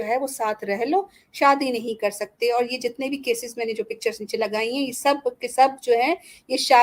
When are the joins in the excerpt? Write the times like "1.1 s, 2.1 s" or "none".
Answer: none

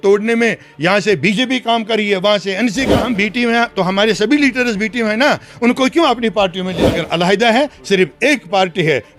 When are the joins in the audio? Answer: 3.0 s, 6.8 s

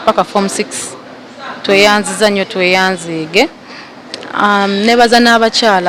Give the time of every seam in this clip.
none

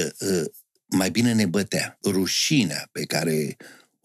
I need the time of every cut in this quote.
2.0 s

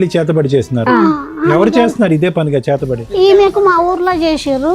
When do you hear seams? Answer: 2.9 s

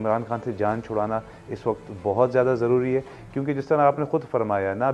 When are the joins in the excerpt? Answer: none

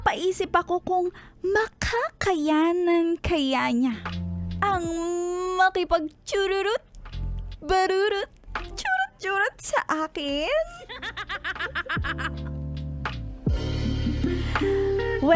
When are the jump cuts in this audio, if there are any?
none

